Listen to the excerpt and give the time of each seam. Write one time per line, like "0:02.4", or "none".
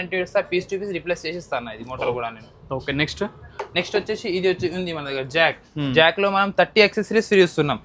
none